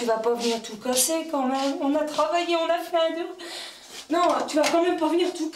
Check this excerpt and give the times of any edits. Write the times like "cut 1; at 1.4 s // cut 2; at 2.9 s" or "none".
cut 1; at 4.0 s